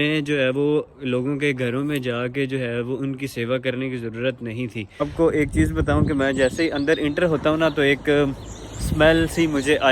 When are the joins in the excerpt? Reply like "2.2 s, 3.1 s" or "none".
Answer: 5.0 s